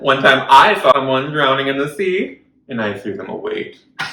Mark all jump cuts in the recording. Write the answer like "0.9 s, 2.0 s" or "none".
0.9 s